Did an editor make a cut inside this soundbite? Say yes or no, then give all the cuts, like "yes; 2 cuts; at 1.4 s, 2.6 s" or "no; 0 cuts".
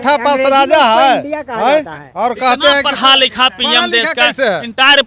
no; 0 cuts